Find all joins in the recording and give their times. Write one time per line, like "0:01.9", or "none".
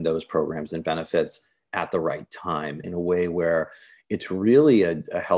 0:02.8

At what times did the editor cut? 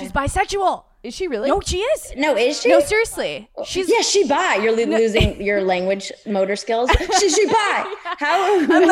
0:02.9

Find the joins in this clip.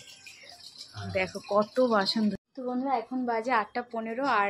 0:02.4

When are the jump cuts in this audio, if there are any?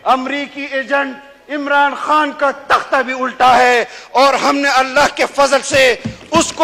none

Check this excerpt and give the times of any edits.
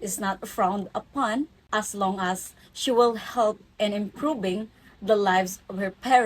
0:01.6

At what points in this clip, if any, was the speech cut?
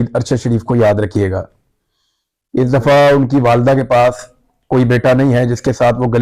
none

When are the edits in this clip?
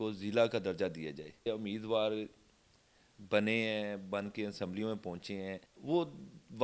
0:01.4
0:05.7

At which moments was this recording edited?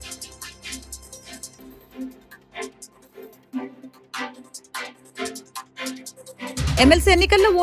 0:01.2

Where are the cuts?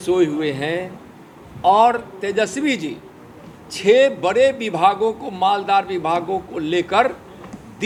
none

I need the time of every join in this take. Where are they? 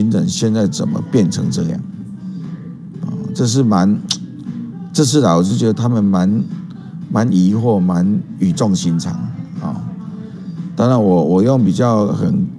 none

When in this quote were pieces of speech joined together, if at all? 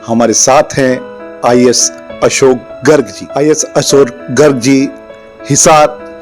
0:03.2

